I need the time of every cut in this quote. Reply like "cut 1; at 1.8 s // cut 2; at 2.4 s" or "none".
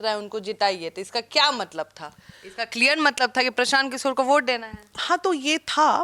none